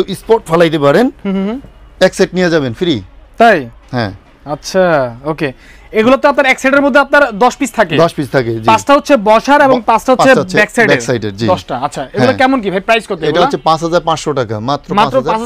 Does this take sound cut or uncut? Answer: uncut